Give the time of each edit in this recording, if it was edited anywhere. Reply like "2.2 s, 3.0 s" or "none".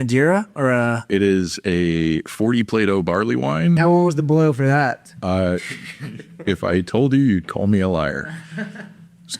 1.1 s, 3.8 s